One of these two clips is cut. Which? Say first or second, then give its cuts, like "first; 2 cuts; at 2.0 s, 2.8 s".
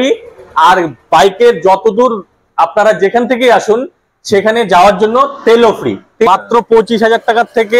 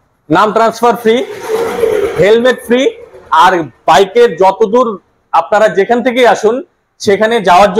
first; 1 cut; at 6.3 s